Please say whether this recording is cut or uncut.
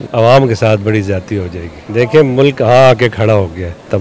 cut